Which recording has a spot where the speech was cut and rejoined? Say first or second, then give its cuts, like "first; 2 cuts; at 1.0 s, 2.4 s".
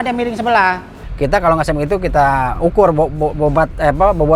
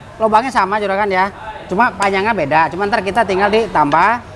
first; 1 cut; at 1.0 s